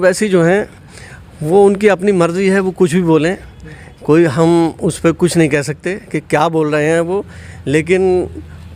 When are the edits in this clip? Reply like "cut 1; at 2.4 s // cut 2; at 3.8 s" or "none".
none